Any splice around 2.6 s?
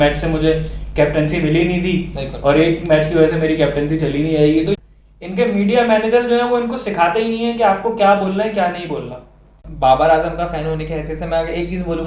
no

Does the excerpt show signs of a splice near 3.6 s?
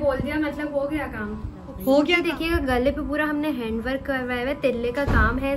no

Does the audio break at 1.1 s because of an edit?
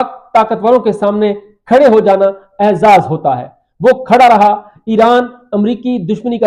yes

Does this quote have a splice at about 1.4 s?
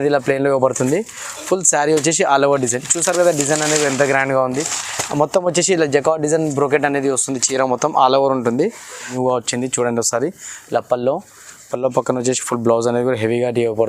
no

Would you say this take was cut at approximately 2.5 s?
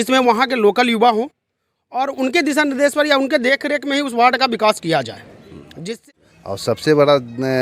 no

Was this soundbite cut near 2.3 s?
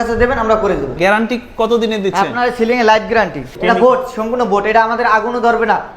no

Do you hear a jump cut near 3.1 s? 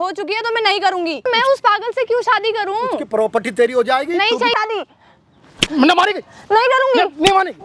no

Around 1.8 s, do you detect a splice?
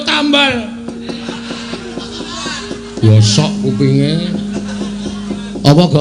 yes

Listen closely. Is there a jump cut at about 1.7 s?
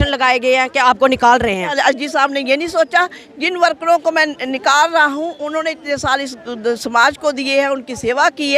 yes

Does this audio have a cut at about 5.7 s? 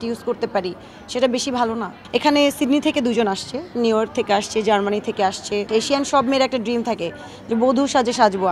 yes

